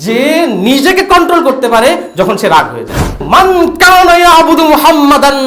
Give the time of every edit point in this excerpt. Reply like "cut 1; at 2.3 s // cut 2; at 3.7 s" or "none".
cut 1; at 3.2 s